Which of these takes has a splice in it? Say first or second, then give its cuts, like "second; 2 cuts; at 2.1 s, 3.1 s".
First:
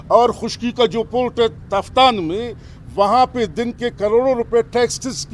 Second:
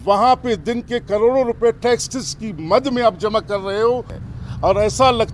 second; 1 cut; at 4.2 s